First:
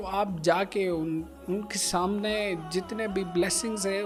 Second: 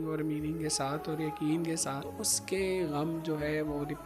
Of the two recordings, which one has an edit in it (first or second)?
second